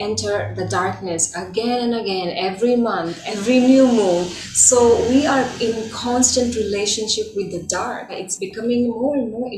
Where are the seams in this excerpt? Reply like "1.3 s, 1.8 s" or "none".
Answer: 3.2 s, 8.3 s